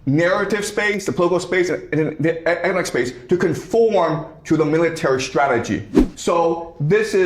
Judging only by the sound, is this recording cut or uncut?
cut